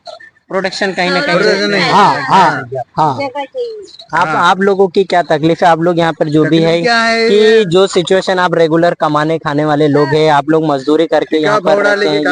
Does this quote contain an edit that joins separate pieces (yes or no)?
no